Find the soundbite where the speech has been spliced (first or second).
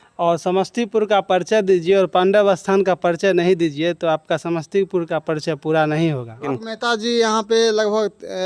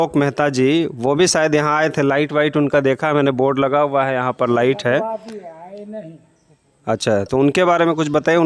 first